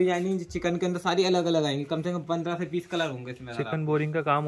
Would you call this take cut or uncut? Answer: uncut